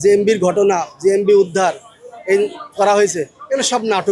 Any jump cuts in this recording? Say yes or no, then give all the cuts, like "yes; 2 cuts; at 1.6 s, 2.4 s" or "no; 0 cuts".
no; 0 cuts